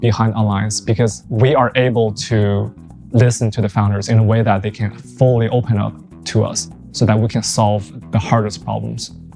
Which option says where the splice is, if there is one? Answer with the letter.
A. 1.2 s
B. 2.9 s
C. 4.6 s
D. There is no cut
A